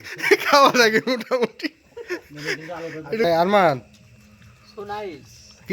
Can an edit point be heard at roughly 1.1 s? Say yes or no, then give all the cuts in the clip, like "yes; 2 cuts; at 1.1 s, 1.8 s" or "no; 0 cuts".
no; 1 cut; at 3.2 s